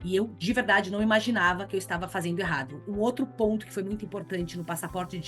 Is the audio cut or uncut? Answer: cut